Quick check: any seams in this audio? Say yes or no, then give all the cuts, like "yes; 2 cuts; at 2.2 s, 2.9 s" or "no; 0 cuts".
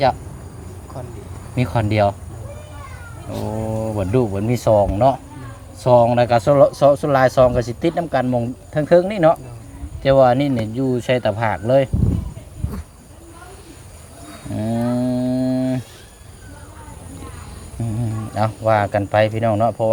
no; 0 cuts